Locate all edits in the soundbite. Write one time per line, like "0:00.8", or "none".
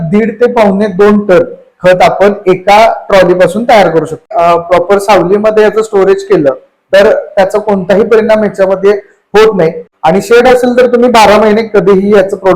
0:04.3
0:09.9